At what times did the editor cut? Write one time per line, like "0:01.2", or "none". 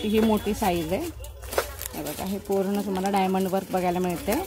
none